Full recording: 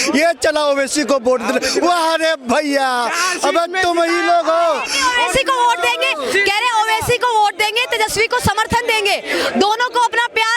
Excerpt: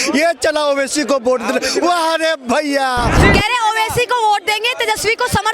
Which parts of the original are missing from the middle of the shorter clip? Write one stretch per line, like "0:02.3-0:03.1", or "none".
0:03.2-0:06.3